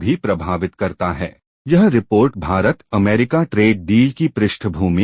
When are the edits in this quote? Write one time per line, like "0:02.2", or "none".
0:01.5